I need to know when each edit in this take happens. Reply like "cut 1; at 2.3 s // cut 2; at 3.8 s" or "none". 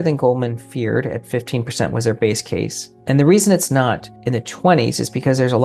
cut 1; at 2.9 s // cut 2; at 4.1 s

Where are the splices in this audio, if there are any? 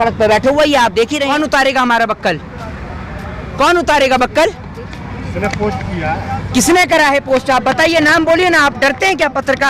cut 1; at 1.3 s

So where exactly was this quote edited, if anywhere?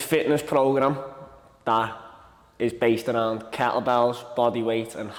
none

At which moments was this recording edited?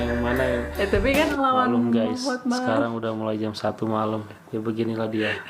cut 1; at 1.3 s

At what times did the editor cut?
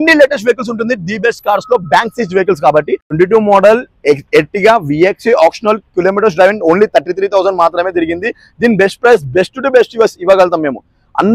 none

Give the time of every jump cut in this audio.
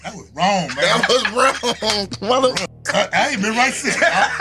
none

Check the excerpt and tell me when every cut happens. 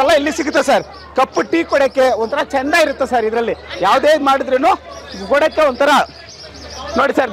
none

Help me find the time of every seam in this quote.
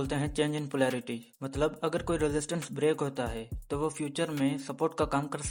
none

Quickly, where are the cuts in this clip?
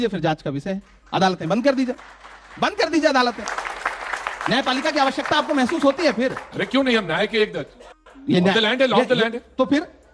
none

